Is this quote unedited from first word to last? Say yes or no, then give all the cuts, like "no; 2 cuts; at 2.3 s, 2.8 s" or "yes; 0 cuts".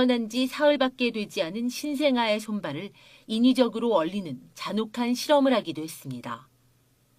no; 1 cut; at 5.3 s